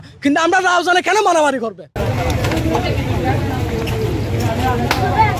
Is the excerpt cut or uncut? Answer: uncut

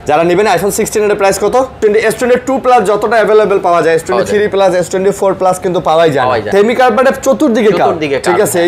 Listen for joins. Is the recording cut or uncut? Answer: cut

